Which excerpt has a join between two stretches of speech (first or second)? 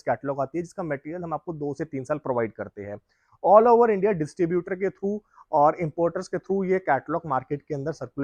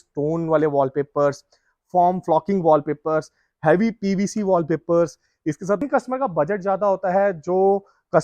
second